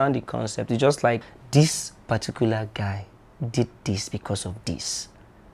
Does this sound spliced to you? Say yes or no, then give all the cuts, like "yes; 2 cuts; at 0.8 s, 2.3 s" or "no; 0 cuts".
yes; 1 cut; at 1.3 s